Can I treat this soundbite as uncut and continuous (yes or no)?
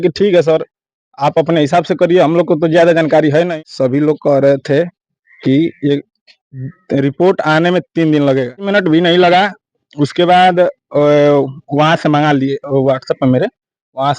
no